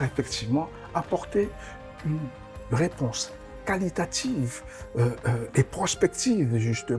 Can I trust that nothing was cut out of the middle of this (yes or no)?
yes